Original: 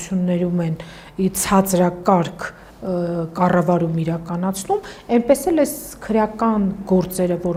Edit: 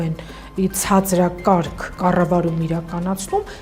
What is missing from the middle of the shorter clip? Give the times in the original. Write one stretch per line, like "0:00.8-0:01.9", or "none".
0:02.5-0:03.3